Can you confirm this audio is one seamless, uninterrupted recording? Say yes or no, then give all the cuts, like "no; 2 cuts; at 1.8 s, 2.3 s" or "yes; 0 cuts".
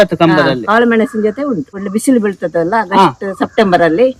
no; 1 cut; at 1.8 s